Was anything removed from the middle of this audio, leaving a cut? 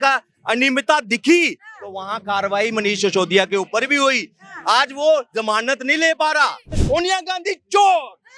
yes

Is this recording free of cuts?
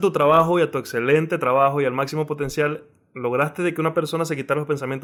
yes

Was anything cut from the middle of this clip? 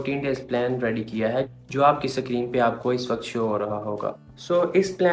no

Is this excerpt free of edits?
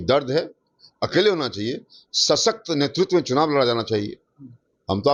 yes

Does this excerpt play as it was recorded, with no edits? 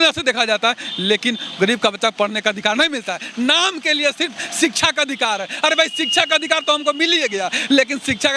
yes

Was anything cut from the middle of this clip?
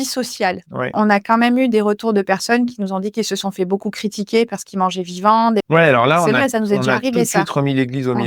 yes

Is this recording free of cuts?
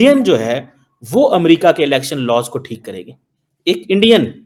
yes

